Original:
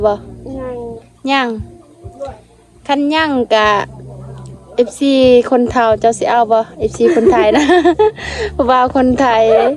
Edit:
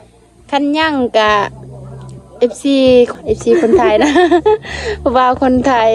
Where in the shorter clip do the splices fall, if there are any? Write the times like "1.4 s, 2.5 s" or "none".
3.1 s